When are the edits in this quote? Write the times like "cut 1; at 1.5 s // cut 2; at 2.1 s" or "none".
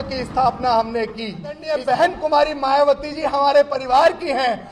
cut 1; at 1.7 s